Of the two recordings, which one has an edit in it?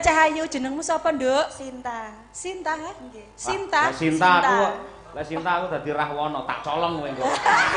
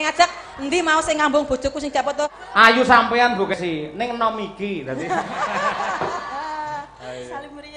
second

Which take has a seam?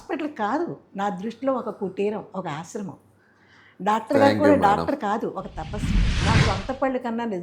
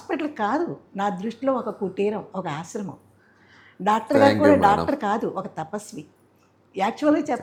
first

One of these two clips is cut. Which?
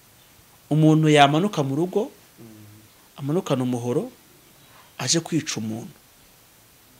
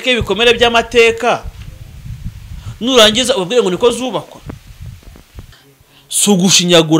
second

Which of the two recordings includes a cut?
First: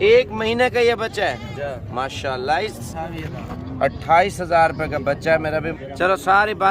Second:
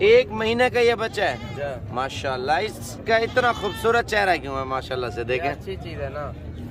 first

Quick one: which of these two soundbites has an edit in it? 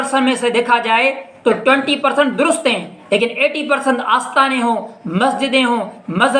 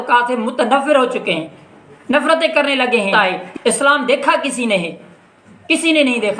second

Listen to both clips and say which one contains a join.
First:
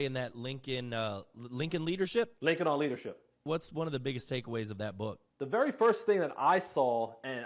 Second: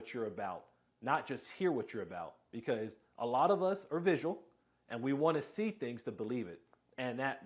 first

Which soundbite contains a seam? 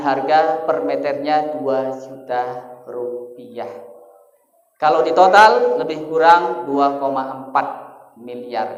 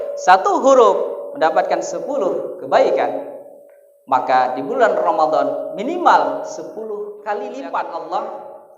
second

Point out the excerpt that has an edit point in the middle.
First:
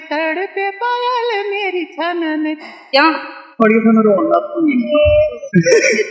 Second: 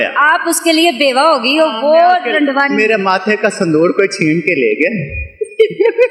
first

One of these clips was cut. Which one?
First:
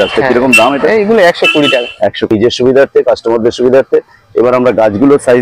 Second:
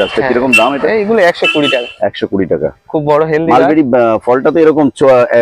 first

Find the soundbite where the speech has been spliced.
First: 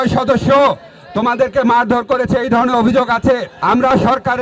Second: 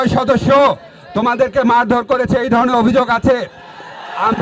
first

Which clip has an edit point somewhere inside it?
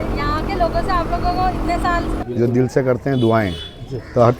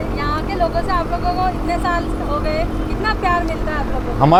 first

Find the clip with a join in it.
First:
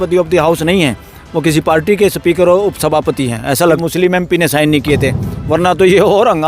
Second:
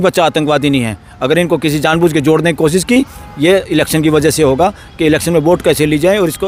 first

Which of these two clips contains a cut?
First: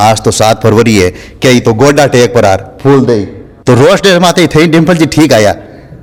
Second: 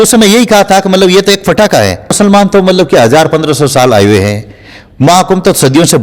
second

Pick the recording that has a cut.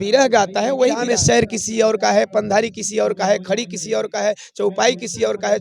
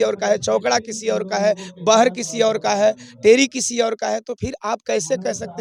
first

